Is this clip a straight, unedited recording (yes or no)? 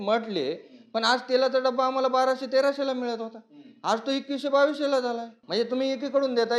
no